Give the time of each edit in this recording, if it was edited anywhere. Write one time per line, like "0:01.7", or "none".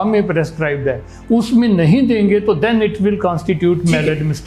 none